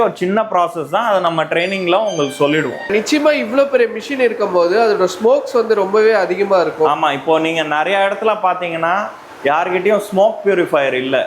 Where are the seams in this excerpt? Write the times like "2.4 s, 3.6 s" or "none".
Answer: none